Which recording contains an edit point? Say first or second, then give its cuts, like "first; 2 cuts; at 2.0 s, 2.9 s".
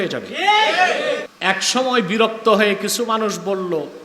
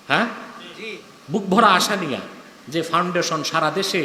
first; 1 cut; at 1.3 s